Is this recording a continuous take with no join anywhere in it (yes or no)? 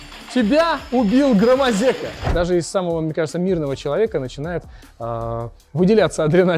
no